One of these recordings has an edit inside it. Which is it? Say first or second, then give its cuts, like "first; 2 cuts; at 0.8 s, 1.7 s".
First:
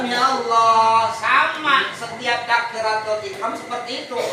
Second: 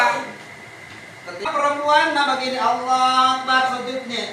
second; 1 cut; at 1.5 s